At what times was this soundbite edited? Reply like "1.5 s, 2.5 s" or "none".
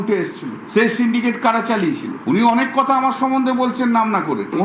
2.1 s